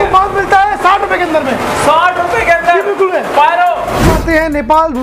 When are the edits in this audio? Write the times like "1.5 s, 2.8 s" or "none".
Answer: 4.1 s